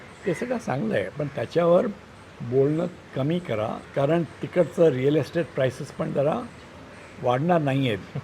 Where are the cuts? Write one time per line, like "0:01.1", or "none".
0:03.8